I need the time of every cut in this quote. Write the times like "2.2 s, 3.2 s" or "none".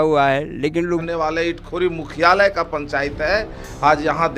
1.1 s